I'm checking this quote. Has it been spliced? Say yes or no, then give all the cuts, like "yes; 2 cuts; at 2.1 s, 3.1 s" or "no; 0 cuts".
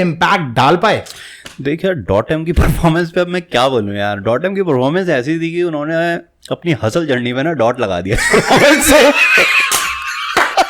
no; 0 cuts